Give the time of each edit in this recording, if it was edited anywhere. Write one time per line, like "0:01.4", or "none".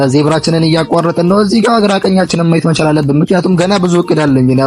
none